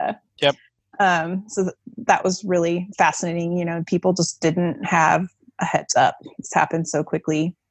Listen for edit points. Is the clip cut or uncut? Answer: uncut